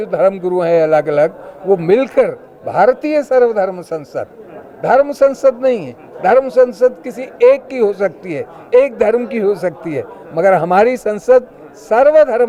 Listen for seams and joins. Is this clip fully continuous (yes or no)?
yes